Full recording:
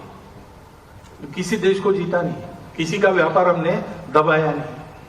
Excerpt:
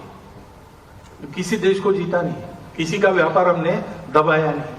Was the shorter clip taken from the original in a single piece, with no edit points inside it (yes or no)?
yes